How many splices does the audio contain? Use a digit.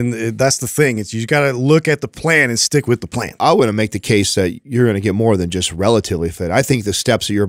1